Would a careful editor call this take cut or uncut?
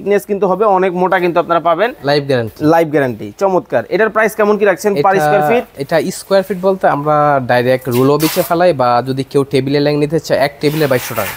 uncut